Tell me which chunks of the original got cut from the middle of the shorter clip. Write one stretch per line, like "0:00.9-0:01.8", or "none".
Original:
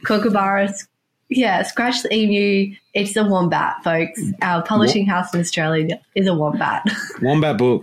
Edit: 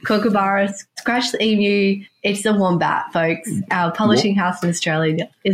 0:01.0-0:01.7